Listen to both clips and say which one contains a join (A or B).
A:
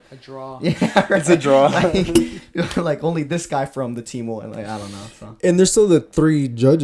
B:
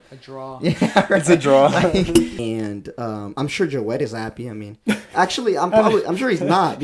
B